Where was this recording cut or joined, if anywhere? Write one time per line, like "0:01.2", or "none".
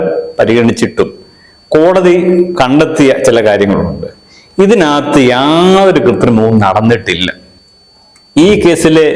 0:07.5